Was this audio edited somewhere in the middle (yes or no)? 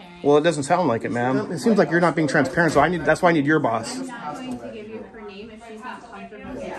yes